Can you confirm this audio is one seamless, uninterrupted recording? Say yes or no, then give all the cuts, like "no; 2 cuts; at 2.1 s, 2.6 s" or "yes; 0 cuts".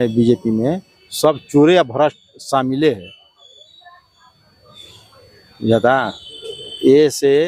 yes; 0 cuts